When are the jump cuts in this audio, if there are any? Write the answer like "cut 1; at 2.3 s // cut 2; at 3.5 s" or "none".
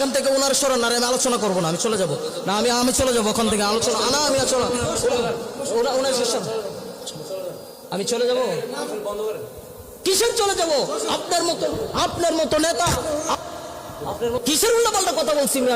cut 1; at 14.4 s